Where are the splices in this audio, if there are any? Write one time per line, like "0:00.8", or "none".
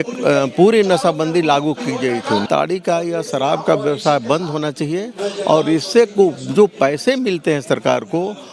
0:02.4

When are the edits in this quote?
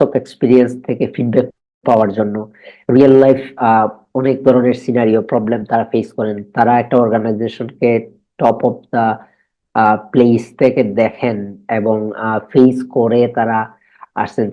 none

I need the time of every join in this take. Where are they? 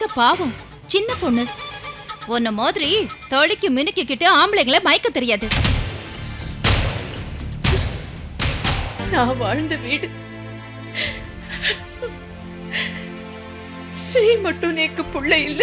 0:09.0

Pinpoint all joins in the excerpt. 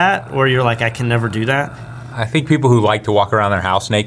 none

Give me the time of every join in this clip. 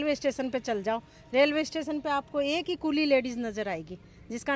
none

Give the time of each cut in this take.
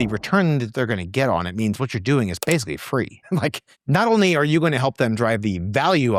none

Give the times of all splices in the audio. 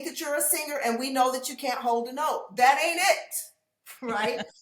none

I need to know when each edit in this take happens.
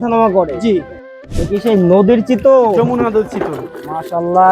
0:01.0

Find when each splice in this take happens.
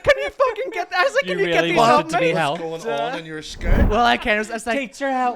0:03.8

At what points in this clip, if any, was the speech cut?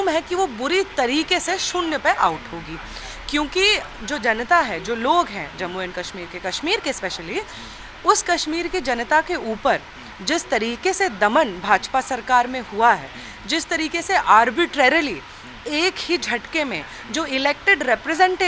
none

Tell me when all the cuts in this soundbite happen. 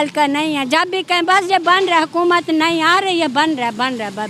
none

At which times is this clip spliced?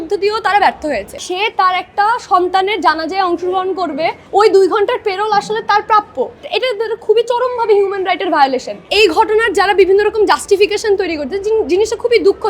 0:01.2
0:04.2
0:06.5
0:08.8

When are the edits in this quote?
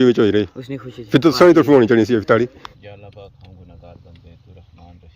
0:02.7

